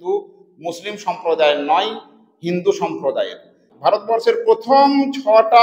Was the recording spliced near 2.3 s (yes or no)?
no